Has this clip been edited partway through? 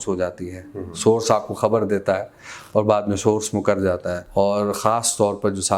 yes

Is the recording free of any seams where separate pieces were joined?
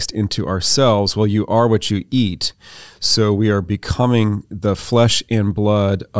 yes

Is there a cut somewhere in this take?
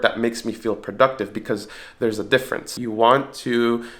yes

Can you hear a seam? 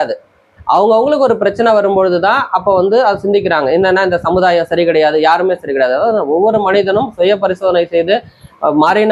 no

